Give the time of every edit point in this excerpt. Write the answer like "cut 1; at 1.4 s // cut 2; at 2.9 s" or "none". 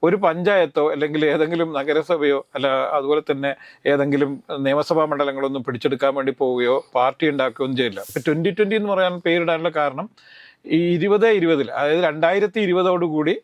cut 1; at 8.0 s